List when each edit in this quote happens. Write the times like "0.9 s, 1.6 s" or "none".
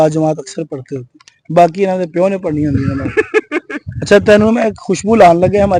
none